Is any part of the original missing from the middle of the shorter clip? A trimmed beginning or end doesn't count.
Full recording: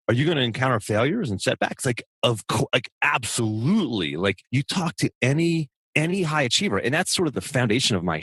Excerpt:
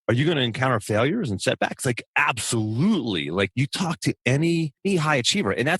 yes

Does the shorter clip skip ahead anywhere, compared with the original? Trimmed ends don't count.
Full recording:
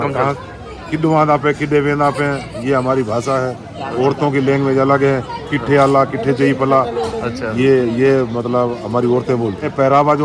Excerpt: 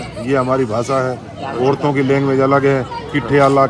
no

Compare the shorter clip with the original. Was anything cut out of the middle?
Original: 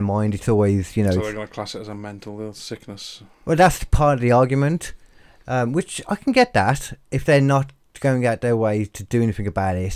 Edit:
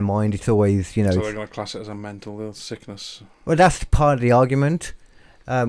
no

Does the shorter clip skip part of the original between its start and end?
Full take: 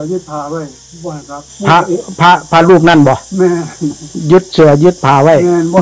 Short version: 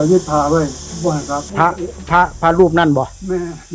yes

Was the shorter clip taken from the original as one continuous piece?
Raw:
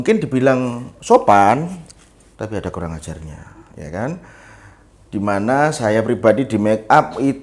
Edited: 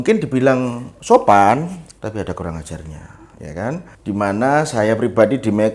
no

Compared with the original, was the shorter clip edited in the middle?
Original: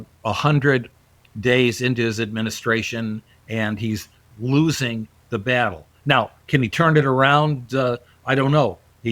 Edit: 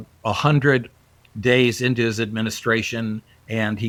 no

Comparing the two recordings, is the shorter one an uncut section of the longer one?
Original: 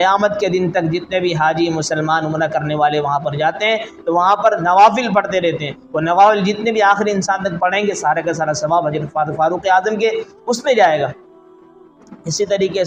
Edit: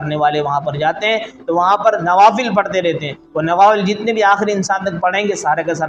yes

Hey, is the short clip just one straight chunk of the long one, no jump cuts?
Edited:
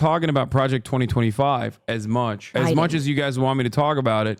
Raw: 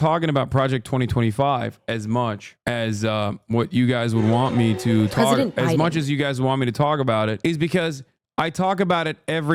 no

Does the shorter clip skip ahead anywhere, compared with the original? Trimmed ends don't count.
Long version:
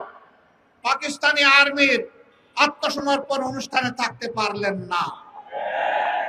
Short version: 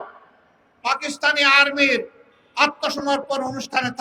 no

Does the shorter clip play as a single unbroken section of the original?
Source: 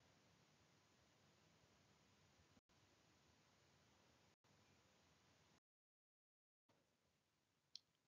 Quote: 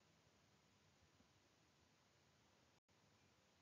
no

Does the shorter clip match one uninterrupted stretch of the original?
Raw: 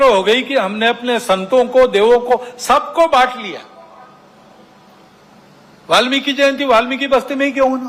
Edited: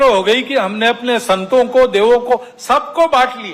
yes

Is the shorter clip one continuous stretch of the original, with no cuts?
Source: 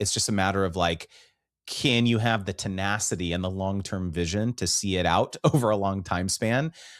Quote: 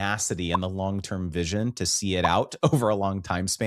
yes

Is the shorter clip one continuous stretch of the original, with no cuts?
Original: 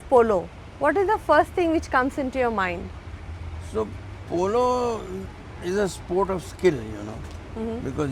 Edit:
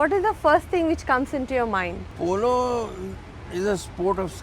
no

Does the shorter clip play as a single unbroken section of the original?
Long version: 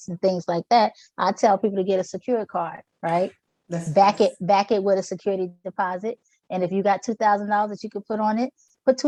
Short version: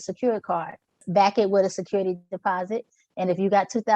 no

